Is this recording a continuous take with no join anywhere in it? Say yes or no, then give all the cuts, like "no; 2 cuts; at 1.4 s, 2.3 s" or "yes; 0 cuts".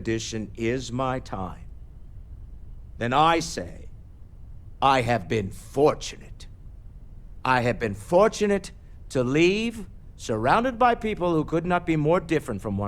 yes; 0 cuts